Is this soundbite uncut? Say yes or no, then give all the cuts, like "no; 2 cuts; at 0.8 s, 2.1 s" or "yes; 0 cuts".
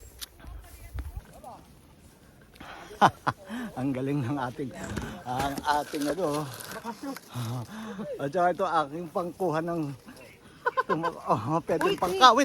no; 1 cut; at 1.2 s